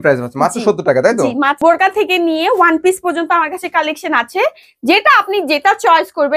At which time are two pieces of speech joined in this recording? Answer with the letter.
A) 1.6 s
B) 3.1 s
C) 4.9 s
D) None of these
A